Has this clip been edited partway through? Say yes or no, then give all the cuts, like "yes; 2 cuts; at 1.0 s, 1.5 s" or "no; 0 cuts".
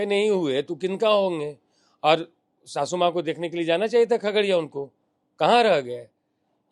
no; 0 cuts